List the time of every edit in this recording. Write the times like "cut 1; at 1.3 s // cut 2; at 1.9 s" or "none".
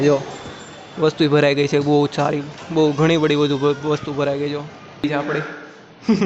cut 1; at 5.0 s